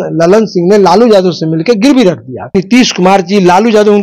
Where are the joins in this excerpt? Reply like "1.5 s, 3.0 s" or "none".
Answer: 2.5 s